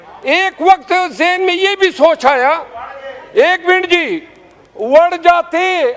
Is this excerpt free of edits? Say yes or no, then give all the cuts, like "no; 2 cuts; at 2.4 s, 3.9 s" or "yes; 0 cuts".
yes; 0 cuts